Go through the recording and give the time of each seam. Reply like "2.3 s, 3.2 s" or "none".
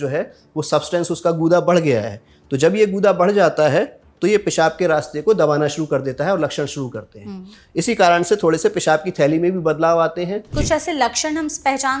10.5 s